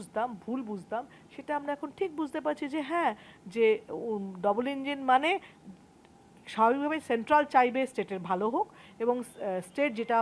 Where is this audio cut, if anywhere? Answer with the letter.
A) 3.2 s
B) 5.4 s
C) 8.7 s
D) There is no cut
D